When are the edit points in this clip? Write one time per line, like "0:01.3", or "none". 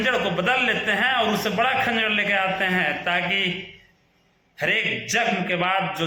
none